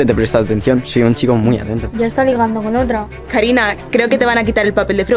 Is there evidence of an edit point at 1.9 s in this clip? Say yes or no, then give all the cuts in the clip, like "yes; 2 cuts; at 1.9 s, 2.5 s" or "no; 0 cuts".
yes; 2 cuts; at 1.9 s, 3.1 s